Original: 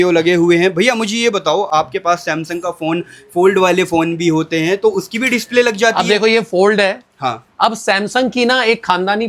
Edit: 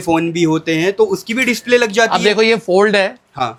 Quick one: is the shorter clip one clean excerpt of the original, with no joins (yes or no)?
yes